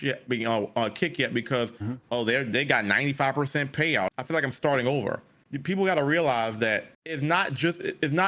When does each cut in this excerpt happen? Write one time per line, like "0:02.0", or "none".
0:04.1
0:07.0